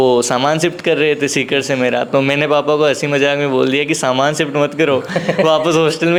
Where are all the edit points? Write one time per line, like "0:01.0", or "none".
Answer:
none